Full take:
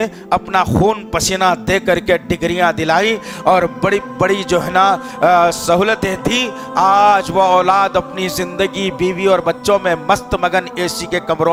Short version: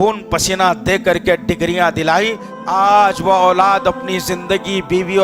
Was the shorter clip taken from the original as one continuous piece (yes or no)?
no